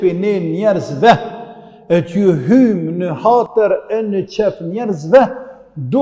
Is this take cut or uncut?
uncut